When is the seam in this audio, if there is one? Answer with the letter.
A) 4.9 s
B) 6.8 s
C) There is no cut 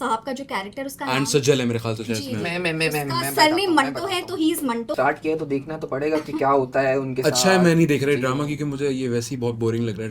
A